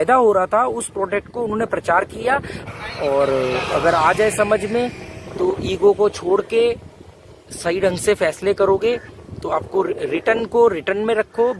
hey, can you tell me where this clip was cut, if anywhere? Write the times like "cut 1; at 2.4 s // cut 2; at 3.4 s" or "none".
cut 1; at 2.6 s